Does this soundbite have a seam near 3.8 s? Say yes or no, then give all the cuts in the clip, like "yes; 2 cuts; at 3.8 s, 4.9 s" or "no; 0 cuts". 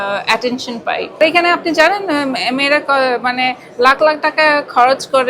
no; 1 cut; at 1.2 s